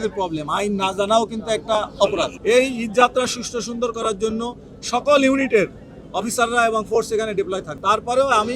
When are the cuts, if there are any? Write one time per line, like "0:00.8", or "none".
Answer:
0:02.3
0:07.7

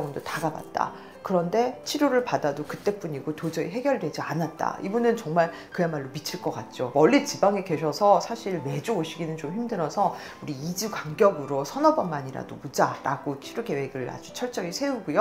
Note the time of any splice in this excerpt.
0:01.8
0:06.9

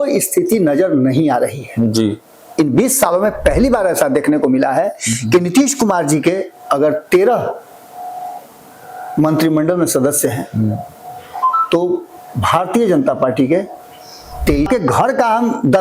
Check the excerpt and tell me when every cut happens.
0:14.7

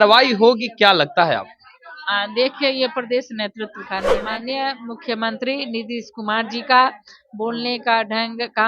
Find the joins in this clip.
0:04.1

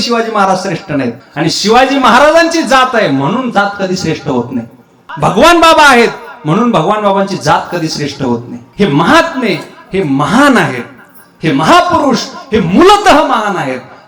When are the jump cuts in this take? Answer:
0:01.2
0:05.0
0:08.6

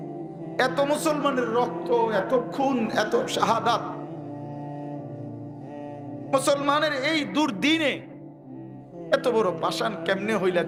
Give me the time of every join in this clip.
none

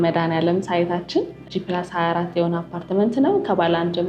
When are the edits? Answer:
0:01.4

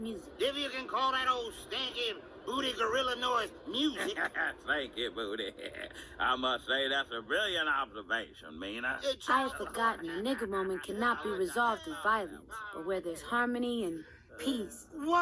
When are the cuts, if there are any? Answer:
0:10.4

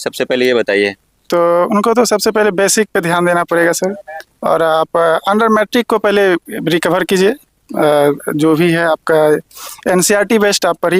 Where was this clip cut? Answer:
none

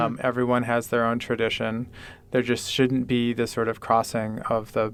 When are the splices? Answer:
none

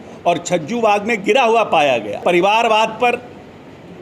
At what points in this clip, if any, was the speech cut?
0:02.2

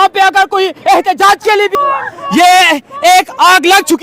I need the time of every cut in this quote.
0:01.7

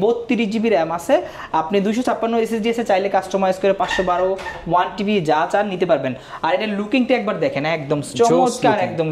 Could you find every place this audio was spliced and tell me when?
none

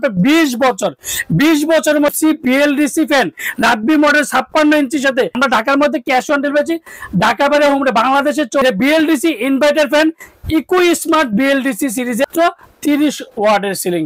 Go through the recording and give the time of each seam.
0:02.1
0:05.4
0:08.6
0:12.2

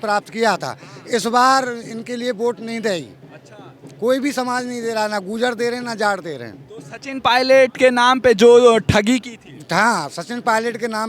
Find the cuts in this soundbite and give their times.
none

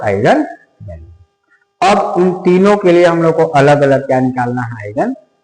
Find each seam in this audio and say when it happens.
none

